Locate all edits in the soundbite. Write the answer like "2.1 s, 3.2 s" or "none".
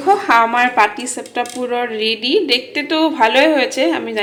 none